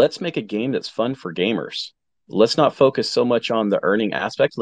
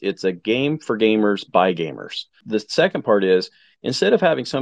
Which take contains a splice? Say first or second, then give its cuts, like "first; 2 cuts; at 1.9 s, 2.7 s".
second; 1 cut; at 2.4 s